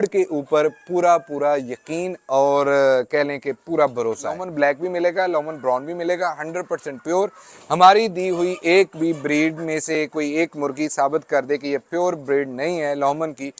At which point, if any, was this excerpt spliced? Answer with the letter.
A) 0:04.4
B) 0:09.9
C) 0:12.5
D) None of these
A